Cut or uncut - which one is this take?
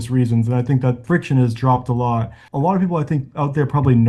cut